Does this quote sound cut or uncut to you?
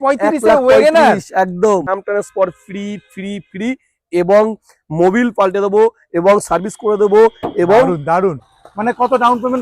cut